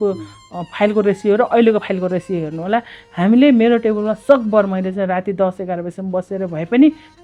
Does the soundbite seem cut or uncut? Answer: uncut